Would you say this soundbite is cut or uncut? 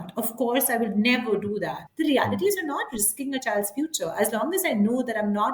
cut